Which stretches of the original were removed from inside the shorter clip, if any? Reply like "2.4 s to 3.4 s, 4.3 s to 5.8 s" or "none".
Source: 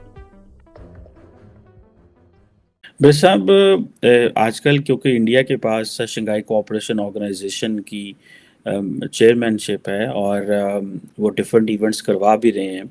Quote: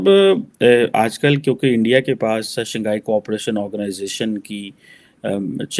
none